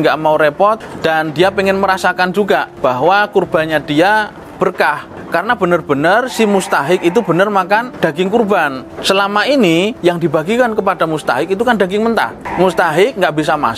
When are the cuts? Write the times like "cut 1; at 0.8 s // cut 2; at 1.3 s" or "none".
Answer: cut 1; at 0.9 s // cut 2; at 2.7 s // cut 3; at 5.1 s // cut 4; at 7.9 s // cut 5; at 8.9 s // cut 6; at 9.9 s // cut 7; at 12.4 s